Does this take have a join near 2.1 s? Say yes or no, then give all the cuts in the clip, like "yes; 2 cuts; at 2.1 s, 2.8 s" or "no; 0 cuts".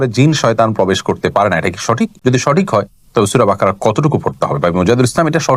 no; 0 cuts